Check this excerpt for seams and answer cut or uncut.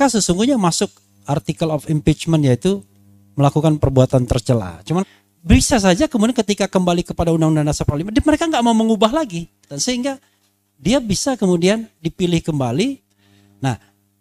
cut